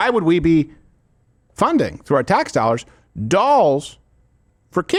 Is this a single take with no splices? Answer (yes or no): yes